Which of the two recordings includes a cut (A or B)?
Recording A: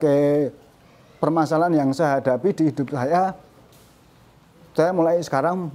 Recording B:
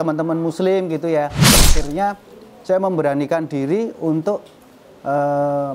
B